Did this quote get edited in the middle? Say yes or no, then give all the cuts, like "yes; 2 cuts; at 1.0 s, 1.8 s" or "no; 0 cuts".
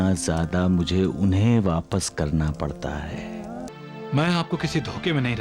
yes; 1 cut; at 3.7 s